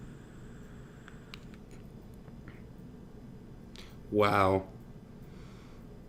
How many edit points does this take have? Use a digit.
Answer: 0